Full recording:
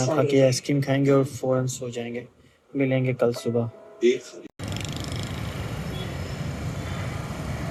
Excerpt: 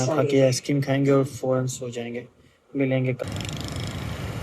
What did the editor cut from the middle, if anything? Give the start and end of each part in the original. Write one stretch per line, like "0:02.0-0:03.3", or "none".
0:03.2-0:04.5